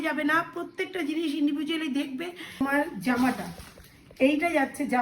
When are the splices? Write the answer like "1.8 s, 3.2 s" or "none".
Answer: 2.6 s